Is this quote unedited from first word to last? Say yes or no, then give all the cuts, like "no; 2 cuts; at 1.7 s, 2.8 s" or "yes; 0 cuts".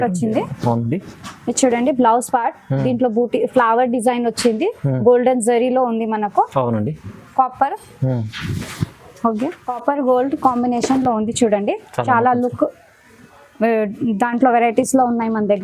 yes; 0 cuts